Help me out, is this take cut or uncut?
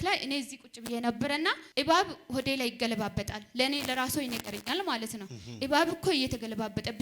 cut